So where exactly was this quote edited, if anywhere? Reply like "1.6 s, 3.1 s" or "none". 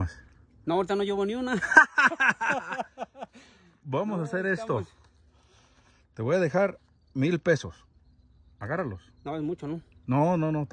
none